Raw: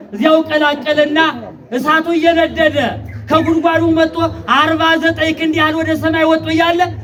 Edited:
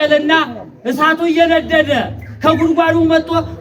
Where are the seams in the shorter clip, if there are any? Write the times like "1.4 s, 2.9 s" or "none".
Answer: none